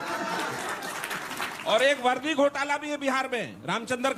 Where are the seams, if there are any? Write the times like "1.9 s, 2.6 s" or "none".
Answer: none